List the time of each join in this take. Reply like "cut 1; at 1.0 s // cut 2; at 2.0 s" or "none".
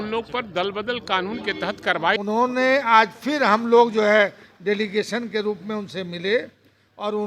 cut 1; at 2.2 s